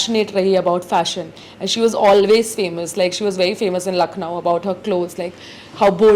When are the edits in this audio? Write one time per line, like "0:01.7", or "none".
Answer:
none